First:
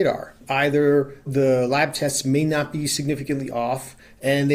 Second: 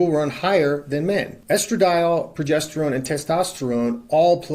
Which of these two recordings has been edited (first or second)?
second